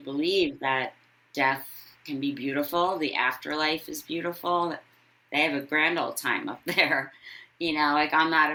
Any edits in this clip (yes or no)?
no